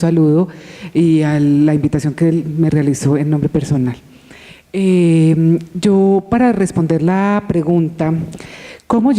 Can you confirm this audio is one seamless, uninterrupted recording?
no; 1 cut; at 6.4 s

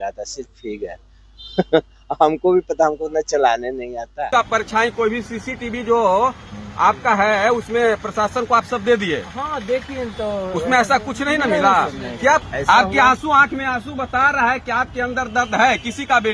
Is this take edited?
yes; 2 cuts; at 4.3 s, 12.5 s

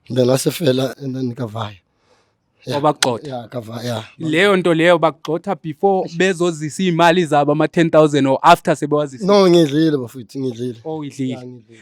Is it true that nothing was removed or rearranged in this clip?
no; 1 cut; at 0.9 s

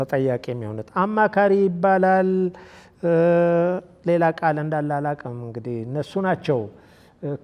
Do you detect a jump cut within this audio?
no; 0 cuts

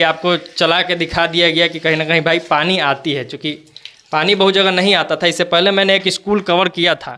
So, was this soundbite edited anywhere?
no; 0 cuts

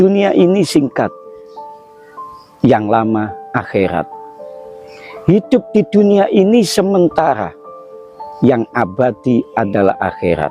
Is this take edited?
no; 0 cuts

